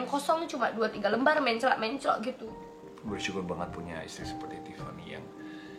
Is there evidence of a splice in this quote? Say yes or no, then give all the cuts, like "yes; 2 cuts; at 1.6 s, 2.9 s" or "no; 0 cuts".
yes; 1 cut; at 2.5 s